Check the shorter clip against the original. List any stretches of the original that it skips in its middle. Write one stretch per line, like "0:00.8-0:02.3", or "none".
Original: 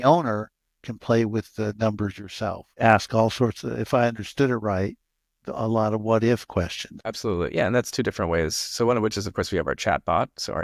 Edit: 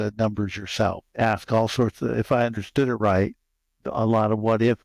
none